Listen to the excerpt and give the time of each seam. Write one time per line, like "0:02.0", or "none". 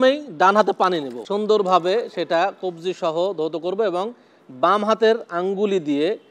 0:01.2